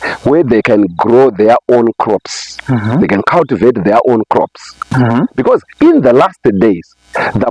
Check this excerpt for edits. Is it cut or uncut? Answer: uncut